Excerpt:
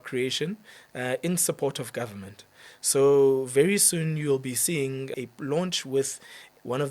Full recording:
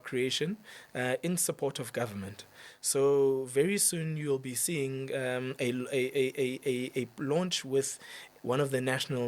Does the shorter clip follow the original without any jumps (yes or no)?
no